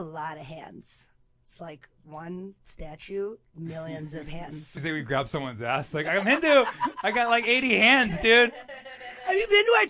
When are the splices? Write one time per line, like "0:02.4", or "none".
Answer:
0:04.8

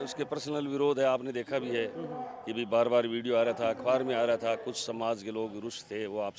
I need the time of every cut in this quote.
none

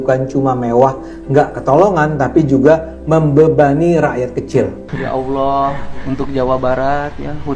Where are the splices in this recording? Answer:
0:04.9

